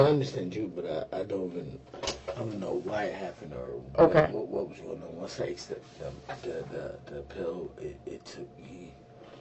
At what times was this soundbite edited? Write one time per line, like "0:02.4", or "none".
none